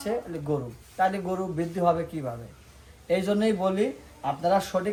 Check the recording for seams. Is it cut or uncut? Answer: uncut